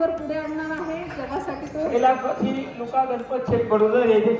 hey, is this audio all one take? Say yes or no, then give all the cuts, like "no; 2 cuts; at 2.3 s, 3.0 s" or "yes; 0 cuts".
no; 2 cuts; at 1.1 s, 1.9 s